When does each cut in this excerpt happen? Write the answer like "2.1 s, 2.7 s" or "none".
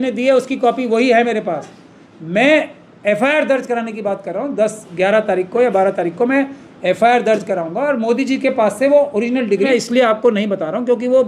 9.7 s

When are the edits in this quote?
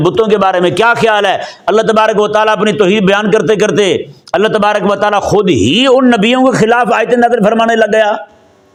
none

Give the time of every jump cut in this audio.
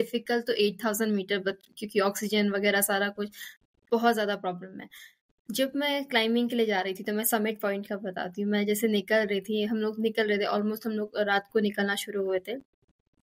none

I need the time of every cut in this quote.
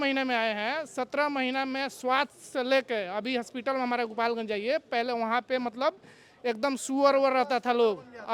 none

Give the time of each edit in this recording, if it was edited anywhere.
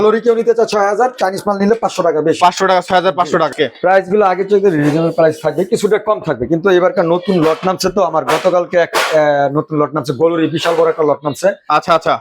3.5 s

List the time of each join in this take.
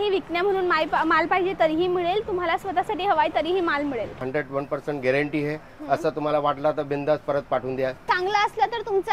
4.2 s, 8.0 s

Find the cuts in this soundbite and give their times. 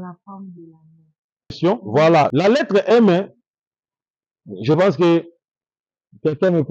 2.3 s

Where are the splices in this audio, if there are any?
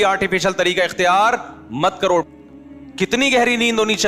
2.3 s

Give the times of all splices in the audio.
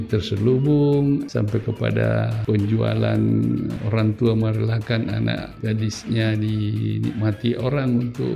1.3 s, 2.4 s, 3.8 s, 5.5 s

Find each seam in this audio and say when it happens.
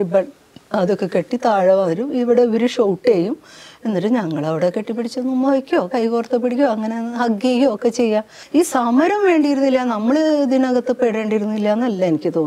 8.4 s

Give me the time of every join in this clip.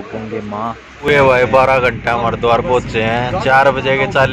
1.1 s

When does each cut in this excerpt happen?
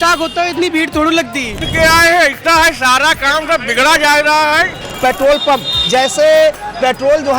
1.6 s, 4.9 s

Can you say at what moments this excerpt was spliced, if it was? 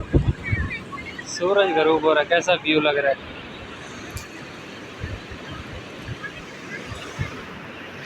6.4 s

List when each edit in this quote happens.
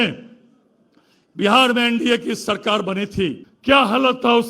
3.5 s

